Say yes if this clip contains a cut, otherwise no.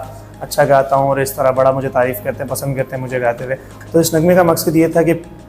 yes